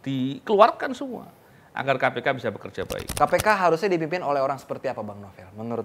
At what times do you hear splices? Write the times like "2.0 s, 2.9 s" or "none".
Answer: 3.1 s